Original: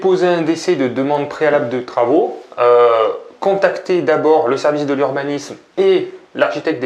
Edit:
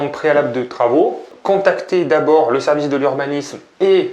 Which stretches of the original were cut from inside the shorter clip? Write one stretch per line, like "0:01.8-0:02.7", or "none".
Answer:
0:02.4-0:03.2